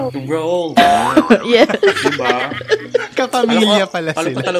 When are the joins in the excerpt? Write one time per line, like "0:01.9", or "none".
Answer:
none